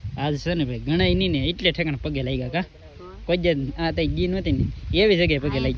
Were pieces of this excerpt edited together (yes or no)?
no